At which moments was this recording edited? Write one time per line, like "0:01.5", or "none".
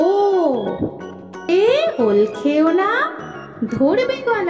0:01.5